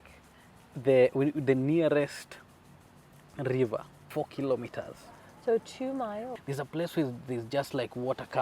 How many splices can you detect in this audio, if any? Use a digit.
2